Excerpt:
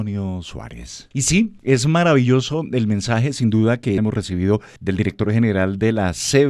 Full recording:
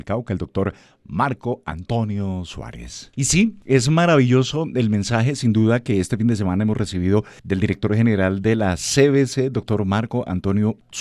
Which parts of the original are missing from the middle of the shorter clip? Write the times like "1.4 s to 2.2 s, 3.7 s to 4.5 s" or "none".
6.0 s to 6.6 s